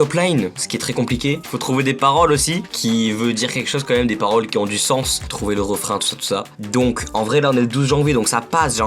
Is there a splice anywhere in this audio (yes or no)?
no